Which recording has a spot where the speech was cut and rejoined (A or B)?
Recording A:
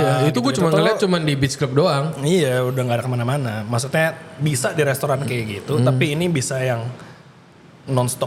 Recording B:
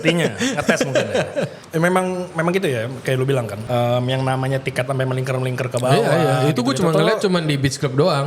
B